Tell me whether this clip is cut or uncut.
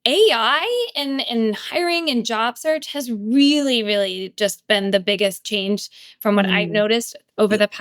uncut